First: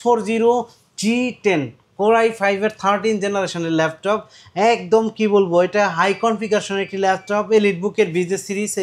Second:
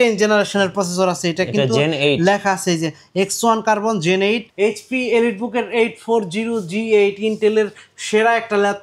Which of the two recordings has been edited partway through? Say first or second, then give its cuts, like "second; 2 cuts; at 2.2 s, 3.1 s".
second; 1 cut; at 4.5 s